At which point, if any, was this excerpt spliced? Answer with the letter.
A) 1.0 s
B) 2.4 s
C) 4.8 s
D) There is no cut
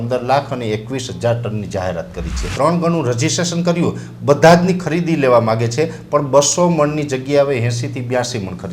B